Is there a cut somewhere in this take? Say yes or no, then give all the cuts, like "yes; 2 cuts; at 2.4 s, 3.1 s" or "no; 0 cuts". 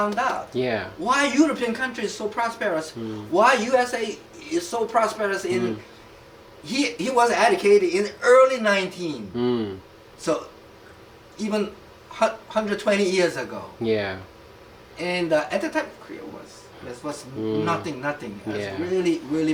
no; 0 cuts